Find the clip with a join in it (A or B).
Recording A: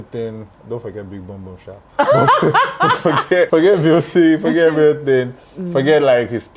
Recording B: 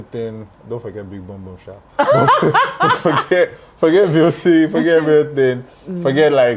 A